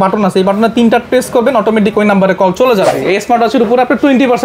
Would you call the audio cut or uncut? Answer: cut